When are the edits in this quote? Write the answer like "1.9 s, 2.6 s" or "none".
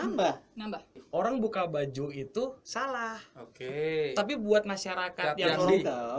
0.9 s